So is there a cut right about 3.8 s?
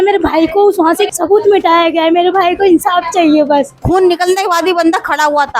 yes; 2 cuts; at 1.1 s, 3.8 s

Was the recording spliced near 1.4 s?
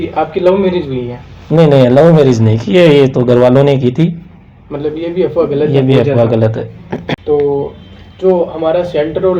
no; 0 cuts

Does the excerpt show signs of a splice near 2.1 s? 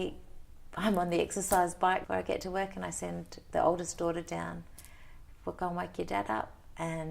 yes; 1 cut; at 2.1 s

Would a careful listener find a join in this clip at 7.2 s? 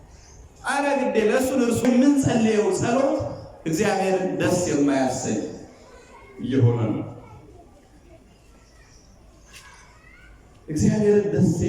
no; 1 cut; at 1.8 s

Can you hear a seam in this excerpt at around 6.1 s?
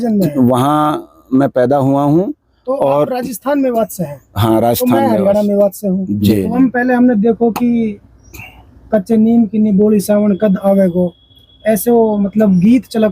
yes; 1 cut; at 6.1 s

